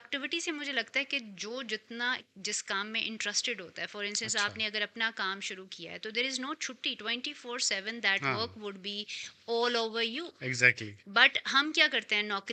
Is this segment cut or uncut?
uncut